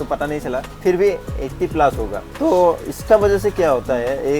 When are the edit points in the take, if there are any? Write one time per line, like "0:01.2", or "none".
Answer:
none